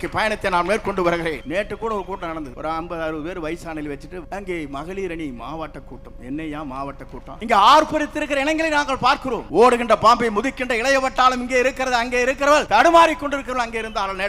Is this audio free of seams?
no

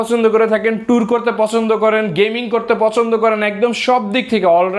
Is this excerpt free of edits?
yes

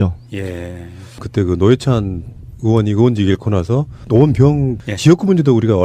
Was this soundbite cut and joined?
no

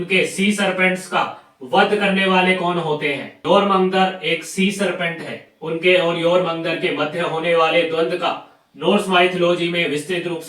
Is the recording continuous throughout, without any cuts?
no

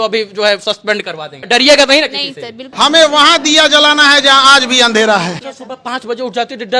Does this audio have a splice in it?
yes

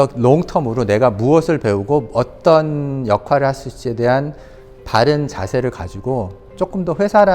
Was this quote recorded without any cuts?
yes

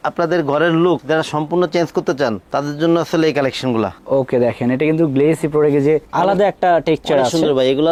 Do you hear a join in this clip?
no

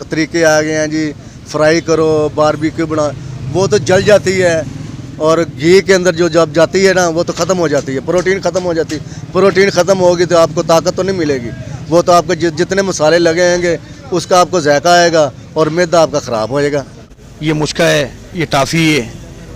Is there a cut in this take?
yes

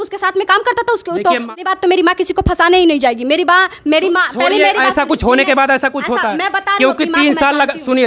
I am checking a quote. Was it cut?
yes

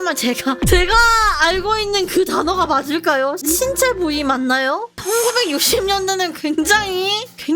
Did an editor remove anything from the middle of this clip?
no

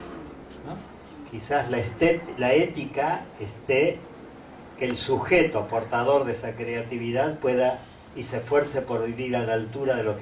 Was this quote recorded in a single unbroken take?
no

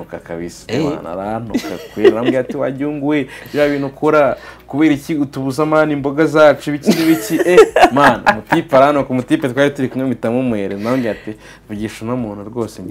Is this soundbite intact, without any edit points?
yes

